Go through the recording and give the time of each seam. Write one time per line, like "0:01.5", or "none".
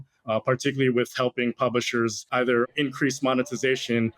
0:02.6